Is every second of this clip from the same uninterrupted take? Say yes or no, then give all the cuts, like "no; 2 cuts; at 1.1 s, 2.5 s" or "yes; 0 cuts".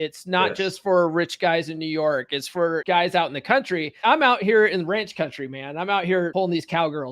no; 3 cuts; at 2.8 s, 3.9 s, 6.3 s